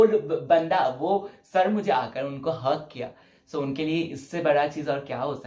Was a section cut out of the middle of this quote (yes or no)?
no